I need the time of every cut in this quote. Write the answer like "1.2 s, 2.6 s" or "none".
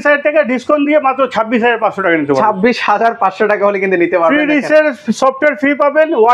none